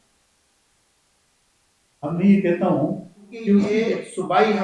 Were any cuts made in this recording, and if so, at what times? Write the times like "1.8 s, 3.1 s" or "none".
3.7 s